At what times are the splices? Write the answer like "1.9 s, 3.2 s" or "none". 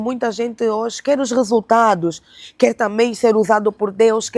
none